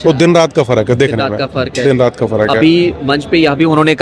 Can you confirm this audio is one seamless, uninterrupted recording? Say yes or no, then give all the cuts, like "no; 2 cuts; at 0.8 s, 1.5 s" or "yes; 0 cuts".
yes; 0 cuts